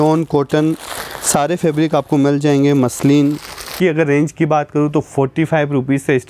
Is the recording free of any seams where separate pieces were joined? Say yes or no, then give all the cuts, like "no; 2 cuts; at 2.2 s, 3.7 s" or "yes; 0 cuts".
no; 1 cut; at 3.7 s